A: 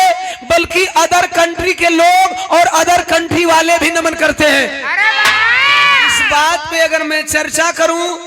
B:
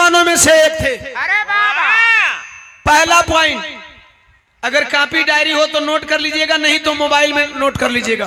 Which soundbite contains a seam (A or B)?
A